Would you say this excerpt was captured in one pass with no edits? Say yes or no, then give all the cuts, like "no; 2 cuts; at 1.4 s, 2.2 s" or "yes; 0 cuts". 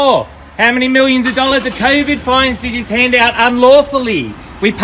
yes; 0 cuts